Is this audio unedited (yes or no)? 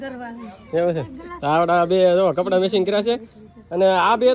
yes